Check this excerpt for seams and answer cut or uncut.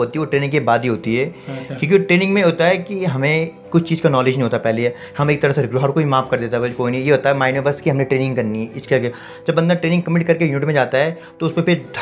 uncut